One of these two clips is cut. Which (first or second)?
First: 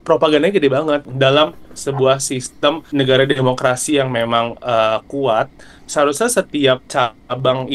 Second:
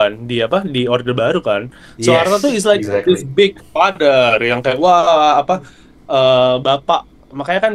first